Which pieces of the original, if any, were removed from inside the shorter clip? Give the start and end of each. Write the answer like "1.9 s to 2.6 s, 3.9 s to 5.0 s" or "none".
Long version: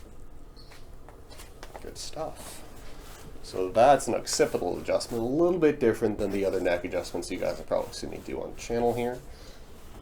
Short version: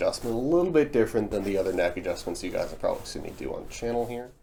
none